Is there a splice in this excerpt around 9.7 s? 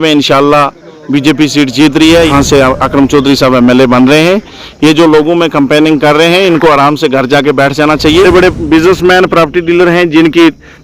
no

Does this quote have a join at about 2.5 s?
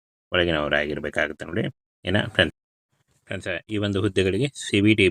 yes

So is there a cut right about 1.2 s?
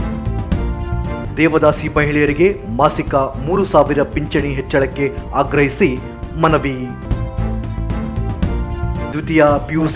yes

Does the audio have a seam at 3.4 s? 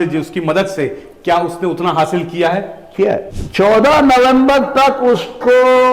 yes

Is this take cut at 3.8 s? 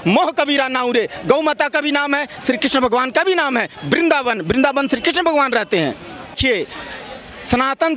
no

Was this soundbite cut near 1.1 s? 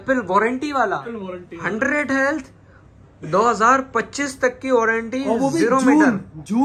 yes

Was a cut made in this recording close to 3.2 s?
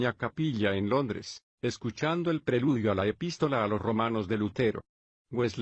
no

